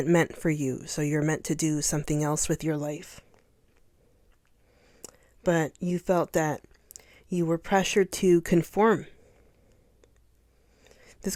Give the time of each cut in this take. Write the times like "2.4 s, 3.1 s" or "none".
none